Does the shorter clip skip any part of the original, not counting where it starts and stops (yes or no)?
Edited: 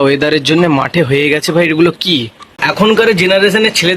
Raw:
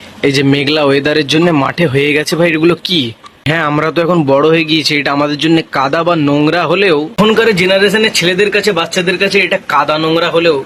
yes